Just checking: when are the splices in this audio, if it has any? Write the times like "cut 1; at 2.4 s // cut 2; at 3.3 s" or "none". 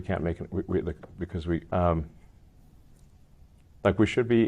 cut 1; at 1.6 s